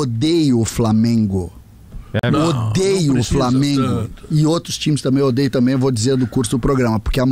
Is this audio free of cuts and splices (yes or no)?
yes